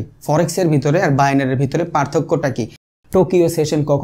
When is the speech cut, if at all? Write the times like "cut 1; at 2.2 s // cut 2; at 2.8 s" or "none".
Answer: cut 1; at 2.8 s

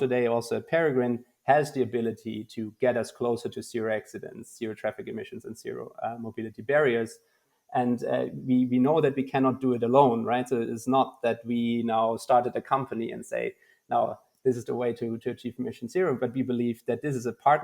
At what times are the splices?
cut 1; at 7.5 s

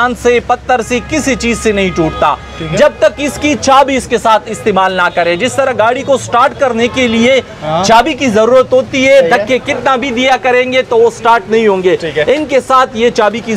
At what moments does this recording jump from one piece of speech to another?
none

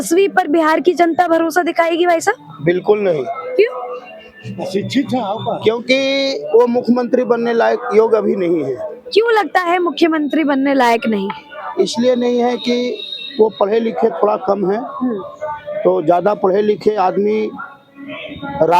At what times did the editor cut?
none

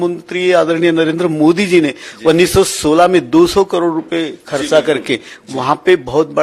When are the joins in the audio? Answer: none

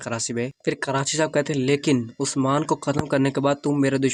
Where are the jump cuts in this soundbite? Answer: none

